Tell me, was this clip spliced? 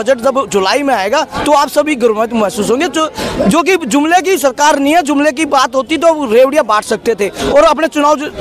no; 0 cuts

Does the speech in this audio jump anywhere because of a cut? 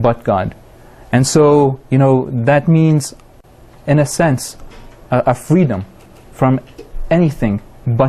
yes; 1 cut; at 4.1 s

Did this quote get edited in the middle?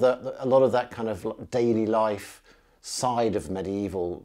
no; 0 cuts

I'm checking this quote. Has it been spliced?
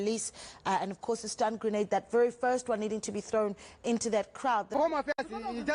yes; 1 cut; at 4.8 s

